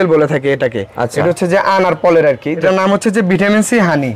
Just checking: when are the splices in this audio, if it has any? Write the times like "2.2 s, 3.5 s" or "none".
2.6 s